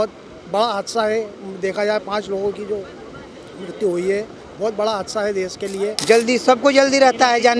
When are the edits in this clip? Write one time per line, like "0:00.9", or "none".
0:05.9